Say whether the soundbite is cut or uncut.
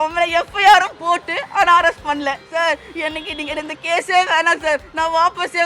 cut